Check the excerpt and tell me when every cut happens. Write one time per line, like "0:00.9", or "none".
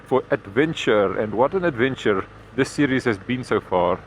0:02.4